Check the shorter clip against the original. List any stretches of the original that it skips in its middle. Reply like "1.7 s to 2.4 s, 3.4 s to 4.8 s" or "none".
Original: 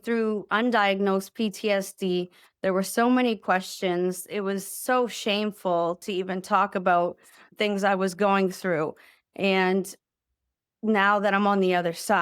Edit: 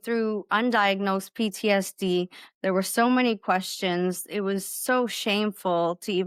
none